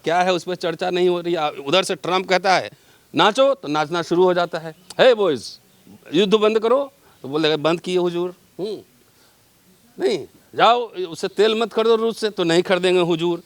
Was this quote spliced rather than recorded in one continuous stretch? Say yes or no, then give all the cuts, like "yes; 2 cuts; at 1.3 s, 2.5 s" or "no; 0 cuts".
no; 0 cuts